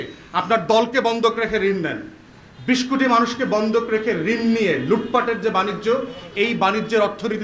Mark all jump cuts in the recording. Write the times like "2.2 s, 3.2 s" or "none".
none